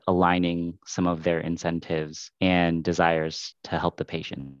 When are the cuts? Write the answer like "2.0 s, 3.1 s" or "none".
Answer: 2.2 s, 3.5 s